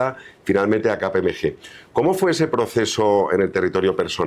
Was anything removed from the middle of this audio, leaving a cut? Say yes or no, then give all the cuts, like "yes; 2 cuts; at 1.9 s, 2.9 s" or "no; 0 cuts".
no; 0 cuts